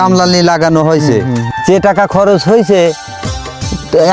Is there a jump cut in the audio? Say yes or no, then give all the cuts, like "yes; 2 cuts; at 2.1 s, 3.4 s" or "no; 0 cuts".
yes; 1 cut; at 1.5 s